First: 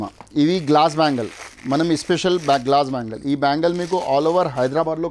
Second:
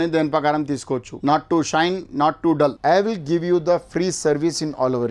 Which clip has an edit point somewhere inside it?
second; 2 cuts; at 1.1 s, 2.8 s

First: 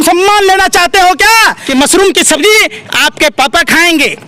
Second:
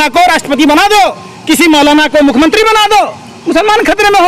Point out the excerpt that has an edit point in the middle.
first; 1 cut; at 1.6 s

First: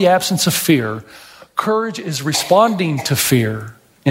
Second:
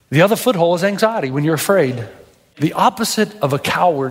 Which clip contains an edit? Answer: second; 1 cut; at 2.5 s

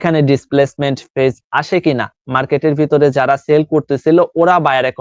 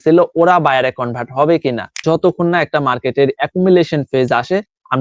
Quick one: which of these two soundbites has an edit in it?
second; 1 cut; at 2.0 s

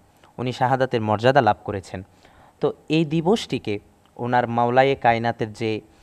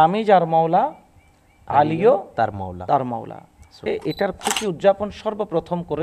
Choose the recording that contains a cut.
second; 1 cut; at 3.9 s

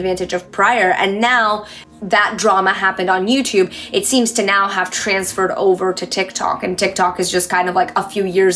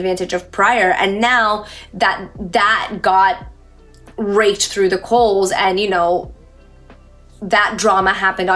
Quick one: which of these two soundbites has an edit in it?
first; 1 cut; at 1.8 s

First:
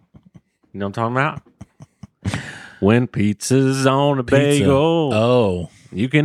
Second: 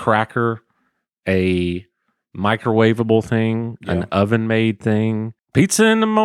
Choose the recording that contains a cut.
second; 1 cut; at 5.4 s

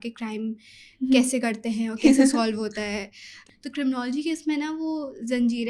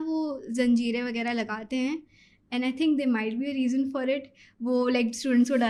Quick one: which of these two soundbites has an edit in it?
first; 1 cut; at 3.4 s

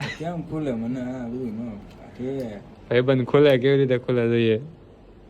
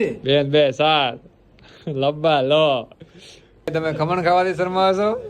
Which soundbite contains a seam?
second; 1 cut; at 3.7 s

